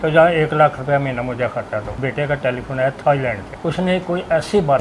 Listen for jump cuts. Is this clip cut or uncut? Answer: cut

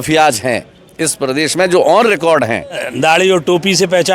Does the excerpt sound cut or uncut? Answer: cut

